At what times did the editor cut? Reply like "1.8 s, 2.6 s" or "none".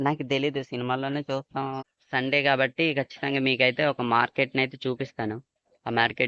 1.8 s